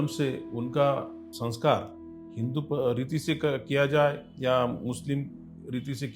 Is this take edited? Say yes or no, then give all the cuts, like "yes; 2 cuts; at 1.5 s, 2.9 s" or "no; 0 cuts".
yes; 1 cut; at 1.2 s